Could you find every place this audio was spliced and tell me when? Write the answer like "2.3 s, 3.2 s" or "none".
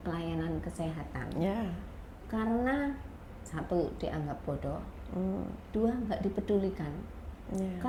none